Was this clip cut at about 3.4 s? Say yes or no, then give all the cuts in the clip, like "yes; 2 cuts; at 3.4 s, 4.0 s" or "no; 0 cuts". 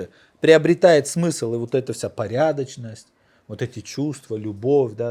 no; 0 cuts